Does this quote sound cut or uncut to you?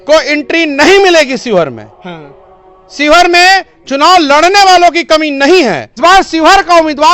cut